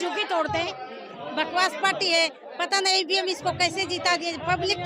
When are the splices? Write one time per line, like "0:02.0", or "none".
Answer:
0:01.0